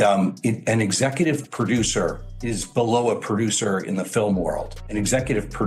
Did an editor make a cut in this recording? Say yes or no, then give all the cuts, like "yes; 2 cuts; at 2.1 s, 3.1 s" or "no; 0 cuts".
no; 0 cuts